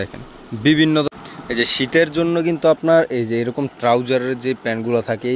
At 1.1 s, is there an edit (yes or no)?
yes